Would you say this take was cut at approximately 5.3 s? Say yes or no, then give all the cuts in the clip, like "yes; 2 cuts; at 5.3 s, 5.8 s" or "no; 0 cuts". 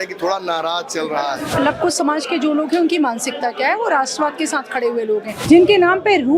yes; 2 cuts; at 1.5 s, 5.3 s